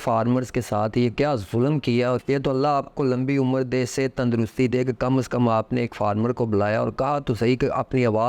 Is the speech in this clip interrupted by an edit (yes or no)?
yes